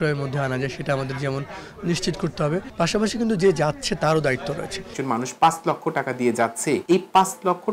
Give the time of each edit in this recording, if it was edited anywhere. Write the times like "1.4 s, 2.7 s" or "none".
2.7 s, 4.9 s, 6.8 s